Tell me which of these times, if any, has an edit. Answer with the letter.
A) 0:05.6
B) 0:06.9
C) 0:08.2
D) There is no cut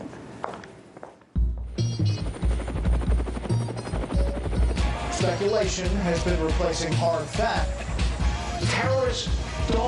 A